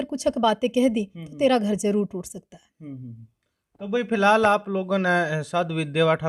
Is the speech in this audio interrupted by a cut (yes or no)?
no